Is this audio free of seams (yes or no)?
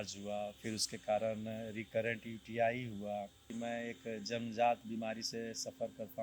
no